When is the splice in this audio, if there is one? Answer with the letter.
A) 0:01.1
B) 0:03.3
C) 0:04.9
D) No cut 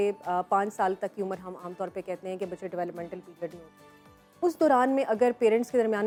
D